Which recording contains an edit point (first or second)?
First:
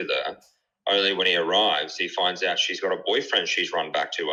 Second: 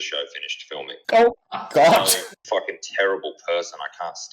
second